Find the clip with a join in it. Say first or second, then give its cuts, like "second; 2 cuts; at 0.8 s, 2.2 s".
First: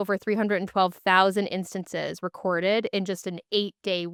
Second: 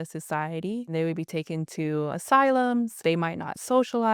second; 3 cuts; at 0.9 s, 2.2 s, 3.0 s